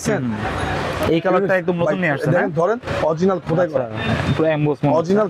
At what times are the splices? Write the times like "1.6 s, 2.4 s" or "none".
none